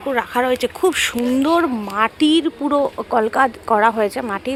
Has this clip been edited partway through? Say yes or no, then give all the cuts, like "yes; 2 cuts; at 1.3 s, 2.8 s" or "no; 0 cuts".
no; 0 cuts